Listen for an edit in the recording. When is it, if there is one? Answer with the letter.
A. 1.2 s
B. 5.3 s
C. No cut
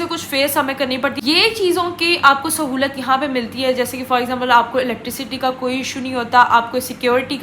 A